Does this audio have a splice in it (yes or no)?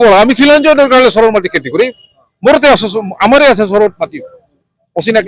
no